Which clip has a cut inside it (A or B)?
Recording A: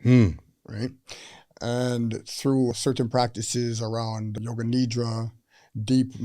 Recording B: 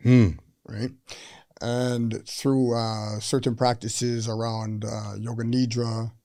A